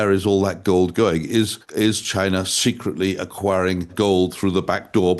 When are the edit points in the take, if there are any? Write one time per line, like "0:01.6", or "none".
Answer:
0:01.6
0:03.9